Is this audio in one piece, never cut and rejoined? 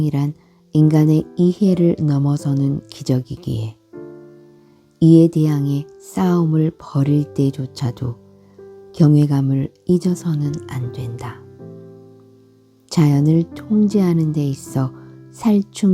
no; 2 cuts; at 3.7 s, 4.8 s

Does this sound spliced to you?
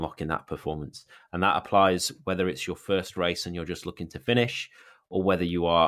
no; 0 cuts

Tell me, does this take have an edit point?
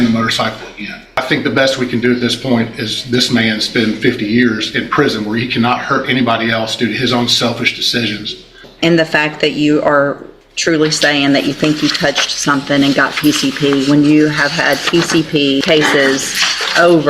yes; 3 cuts; at 1.1 s, 8.7 s, 15.6 s

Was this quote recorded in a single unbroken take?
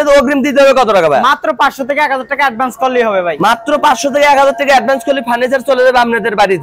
yes; 0 cuts

